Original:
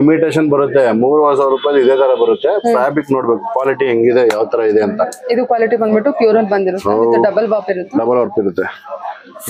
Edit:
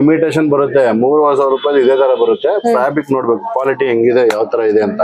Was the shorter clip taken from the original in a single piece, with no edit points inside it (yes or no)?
yes